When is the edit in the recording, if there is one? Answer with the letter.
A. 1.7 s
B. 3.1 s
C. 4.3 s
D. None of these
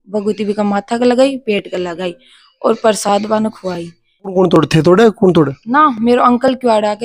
C